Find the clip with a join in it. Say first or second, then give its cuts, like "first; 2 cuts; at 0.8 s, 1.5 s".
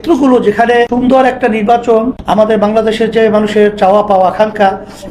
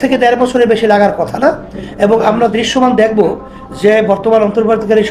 first; 2 cuts; at 0.9 s, 2.2 s